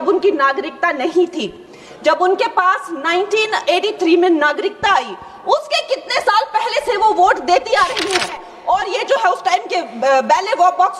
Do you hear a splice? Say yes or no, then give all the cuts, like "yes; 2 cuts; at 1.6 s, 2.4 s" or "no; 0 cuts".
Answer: yes; 1 cut; at 8.5 s